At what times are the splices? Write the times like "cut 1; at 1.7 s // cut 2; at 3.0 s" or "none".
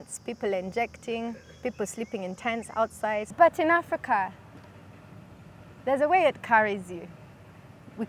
cut 1; at 3.3 s